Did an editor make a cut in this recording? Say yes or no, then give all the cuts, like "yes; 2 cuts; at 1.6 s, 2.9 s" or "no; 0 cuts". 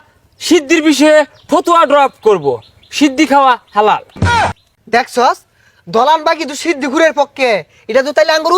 no; 0 cuts